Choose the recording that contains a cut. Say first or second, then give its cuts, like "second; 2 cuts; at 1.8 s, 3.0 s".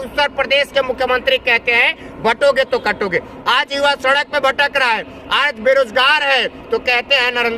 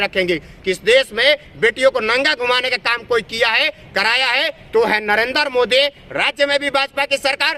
first; 1 cut; at 3.3 s